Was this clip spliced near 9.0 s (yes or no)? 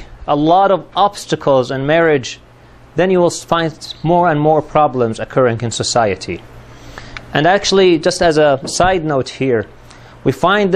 yes